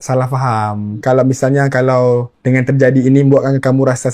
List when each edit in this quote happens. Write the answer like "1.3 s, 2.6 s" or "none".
1.0 s, 2.3 s